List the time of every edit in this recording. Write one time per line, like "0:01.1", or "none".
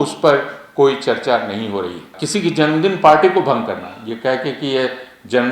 0:02.2

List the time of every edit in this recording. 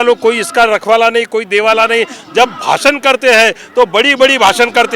none

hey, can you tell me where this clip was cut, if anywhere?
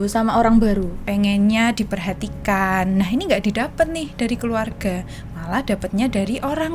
0:01.0

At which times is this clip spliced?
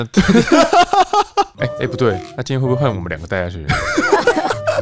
0:01.5
0:02.3

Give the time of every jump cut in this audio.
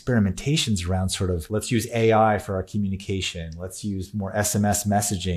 0:01.4

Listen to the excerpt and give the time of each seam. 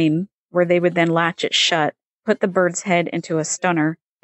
0:02.1

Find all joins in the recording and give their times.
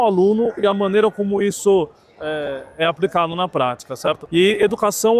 none

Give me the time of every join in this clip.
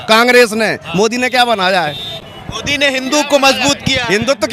none

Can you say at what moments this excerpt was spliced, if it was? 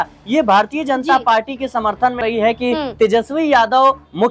0:02.2

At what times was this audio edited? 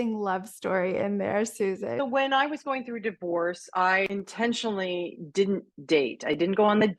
0:02.0
0:04.1

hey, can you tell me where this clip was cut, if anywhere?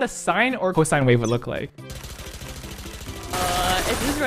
0:01.6

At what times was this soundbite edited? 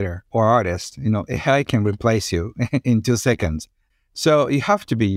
none

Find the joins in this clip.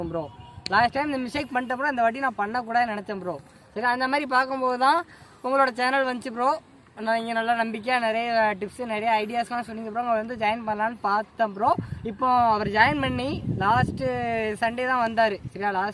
none

